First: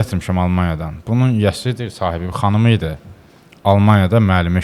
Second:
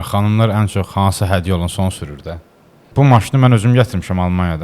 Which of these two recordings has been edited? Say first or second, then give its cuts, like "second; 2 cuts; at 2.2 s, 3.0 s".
second; 1 cut; at 2.8 s